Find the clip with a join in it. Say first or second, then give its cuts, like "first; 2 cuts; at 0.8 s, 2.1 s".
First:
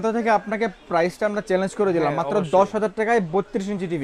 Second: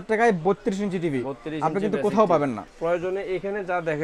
second; 1 cut; at 2.7 s